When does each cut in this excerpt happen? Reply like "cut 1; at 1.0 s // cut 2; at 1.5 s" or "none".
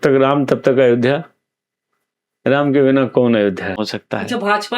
cut 1; at 3.8 s